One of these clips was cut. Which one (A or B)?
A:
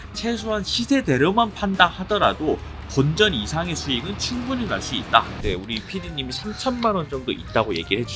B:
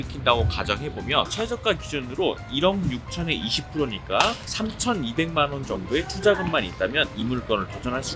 A